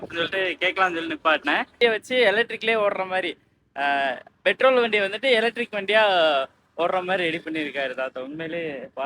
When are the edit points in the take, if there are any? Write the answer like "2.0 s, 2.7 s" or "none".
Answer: 1.8 s